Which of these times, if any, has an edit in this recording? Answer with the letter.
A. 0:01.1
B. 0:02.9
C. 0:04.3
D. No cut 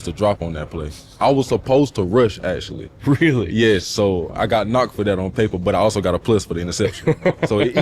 C